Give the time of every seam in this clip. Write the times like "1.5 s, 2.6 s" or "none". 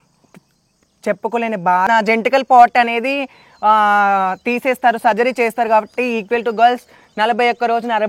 1.9 s